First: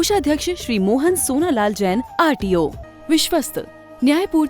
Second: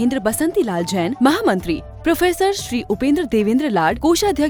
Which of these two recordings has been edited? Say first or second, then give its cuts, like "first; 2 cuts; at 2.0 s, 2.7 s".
first; 1 cut; at 2.8 s